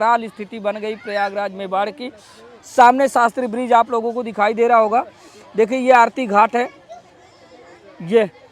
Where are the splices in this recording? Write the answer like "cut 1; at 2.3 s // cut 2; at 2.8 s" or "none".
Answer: none